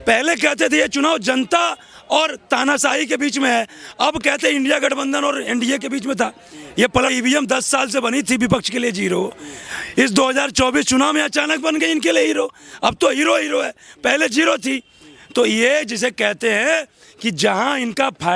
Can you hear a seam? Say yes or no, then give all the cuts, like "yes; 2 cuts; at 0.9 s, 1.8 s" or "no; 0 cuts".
yes; 1 cut; at 7.1 s